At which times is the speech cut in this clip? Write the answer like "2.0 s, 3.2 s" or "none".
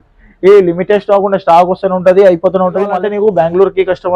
3.0 s